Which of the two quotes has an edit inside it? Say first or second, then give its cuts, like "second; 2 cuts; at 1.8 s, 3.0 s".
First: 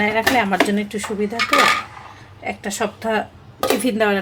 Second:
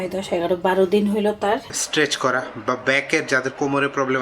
second; 1 cut; at 1.8 s